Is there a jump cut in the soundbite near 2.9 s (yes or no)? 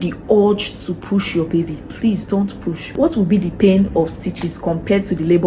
yes